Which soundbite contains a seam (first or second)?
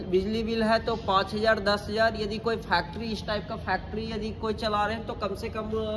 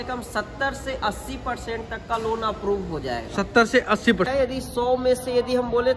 second